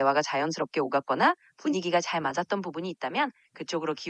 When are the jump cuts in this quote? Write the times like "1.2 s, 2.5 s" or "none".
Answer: none

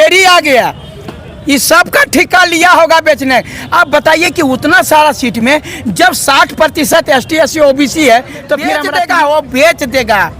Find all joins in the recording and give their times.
8.8 s

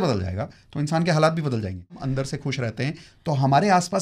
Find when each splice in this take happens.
2.0 s

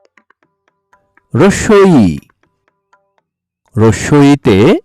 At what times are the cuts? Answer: 0.9 s

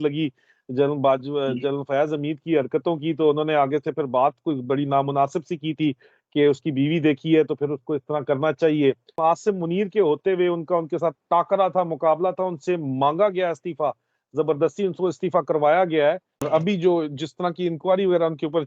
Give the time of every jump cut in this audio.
9.2 s, 16.4 s

